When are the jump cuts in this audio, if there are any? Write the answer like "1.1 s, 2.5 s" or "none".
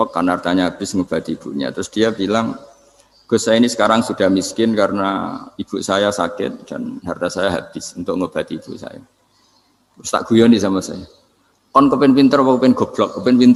none